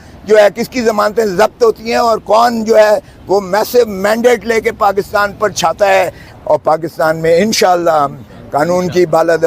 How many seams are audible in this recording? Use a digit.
1